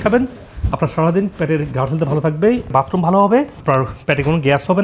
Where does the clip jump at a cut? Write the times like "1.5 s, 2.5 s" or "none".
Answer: 2.7 s